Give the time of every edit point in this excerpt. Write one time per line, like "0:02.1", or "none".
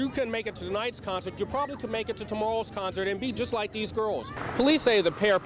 0:04.3

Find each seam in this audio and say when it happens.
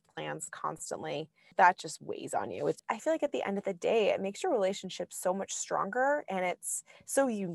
0:01.4
0:02.8

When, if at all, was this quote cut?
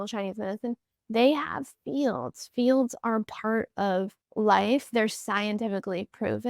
0:04.2

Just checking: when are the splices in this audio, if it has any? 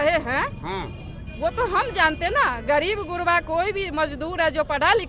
none

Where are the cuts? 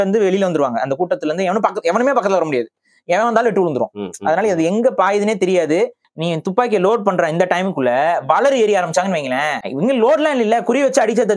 0:06.1
0:09.6

